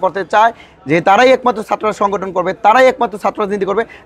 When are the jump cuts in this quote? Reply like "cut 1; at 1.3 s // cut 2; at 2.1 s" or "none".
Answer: none

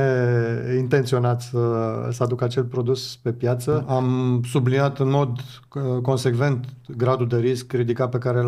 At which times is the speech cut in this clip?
cut 1; at 3.8 s

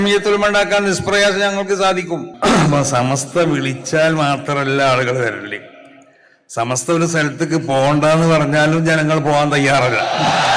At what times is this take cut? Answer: cut 1; at 2.3 s

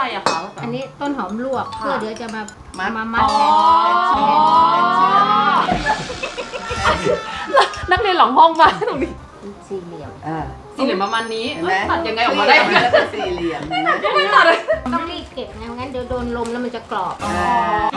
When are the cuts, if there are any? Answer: cut 1; at 9.1 s // cut 2; at 14.9 s

